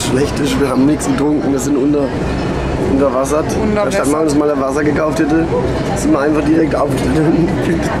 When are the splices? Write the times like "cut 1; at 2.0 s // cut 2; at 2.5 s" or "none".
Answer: none